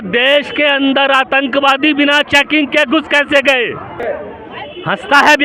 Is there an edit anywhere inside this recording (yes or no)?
yes